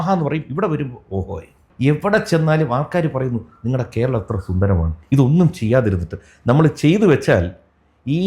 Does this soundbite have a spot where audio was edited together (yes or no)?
yes